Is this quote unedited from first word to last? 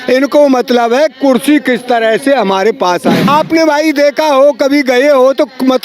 no; 1 cut; at 3.3 s

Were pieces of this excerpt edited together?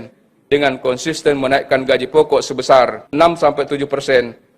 yes; 1 cut; at 3.0 s

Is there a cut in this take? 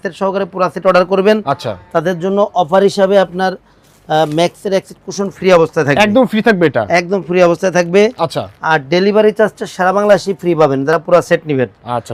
no; 0 cuts

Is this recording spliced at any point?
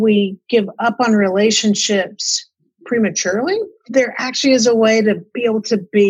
no; 0 cuts

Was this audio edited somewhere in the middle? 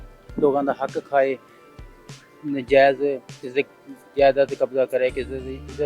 no; 0 cuts

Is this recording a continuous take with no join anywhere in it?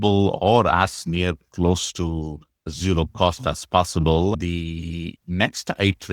no; 1 cut; at 4.3 s

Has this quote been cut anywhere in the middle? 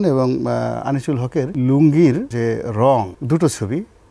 yes; 3 cuts; at 1.5 s, 2.3 s, 3.2 s

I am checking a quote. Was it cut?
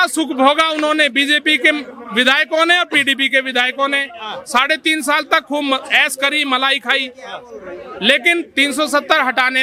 no; 0 cuts

